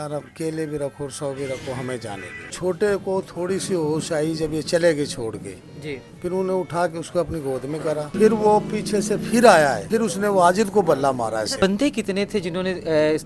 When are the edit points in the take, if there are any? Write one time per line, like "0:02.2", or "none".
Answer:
0:02.5
0:08.1
0:09.8
0:11.5

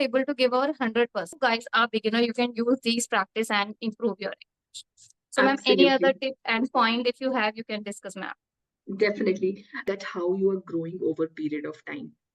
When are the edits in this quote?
0:01.4
0:09.8

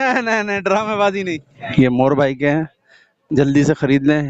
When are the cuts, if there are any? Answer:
0:01.7

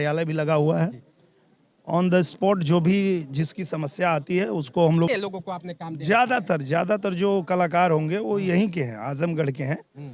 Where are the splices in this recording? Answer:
0:05.1

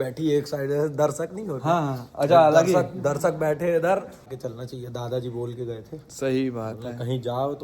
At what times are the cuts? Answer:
0:04.2

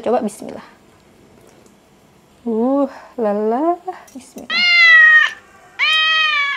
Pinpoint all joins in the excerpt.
none

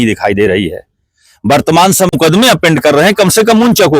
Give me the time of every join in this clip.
0:02.1

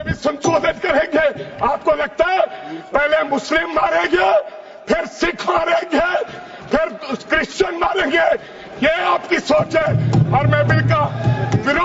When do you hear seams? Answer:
none

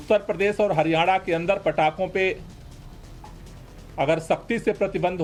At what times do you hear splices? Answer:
none

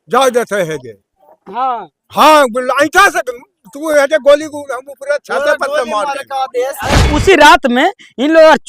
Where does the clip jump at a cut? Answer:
0:07.1

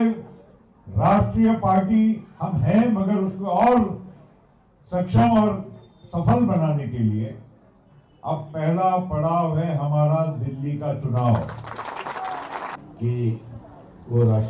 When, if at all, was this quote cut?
0:12.8

